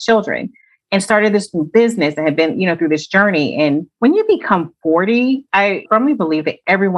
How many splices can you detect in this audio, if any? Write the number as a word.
two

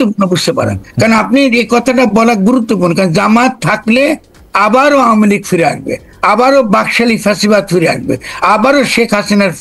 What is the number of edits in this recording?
zero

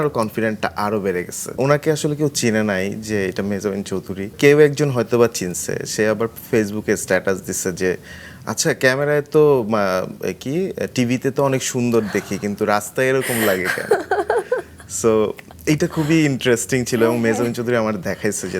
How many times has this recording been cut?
two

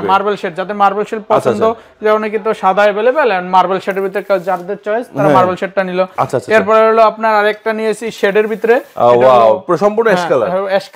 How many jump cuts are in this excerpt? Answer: zero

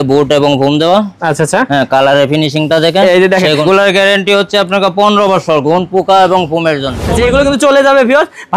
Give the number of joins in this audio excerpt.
two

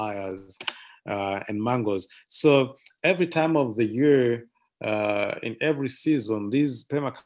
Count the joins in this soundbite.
zero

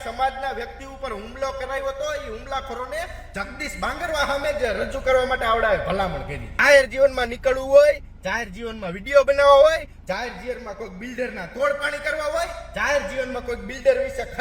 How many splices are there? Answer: one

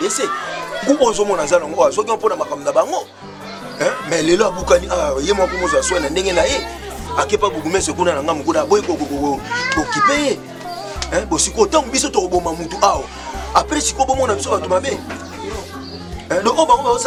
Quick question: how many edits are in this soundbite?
zero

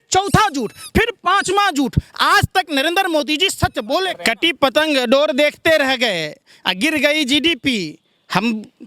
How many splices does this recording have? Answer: one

